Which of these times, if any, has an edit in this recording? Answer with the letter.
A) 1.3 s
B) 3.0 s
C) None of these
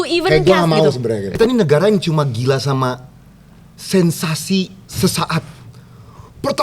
A